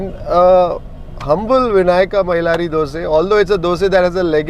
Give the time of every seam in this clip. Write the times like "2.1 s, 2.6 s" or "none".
none